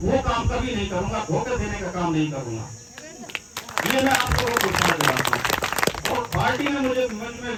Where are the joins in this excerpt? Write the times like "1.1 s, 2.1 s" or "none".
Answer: none